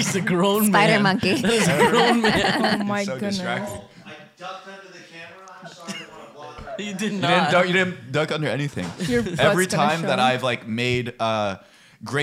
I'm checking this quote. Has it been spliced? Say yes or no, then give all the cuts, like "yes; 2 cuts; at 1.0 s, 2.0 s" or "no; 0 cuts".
no; 0 cuts